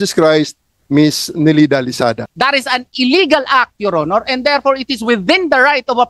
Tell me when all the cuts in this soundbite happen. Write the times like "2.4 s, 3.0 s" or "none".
2.3 s